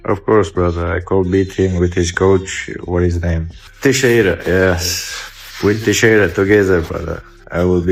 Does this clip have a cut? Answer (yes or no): no